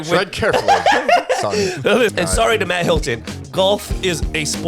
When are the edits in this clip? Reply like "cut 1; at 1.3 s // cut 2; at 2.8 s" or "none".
cut 1; at 2.1 s